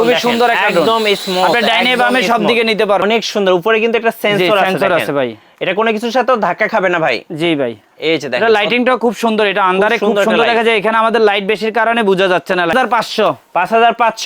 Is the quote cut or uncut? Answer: cut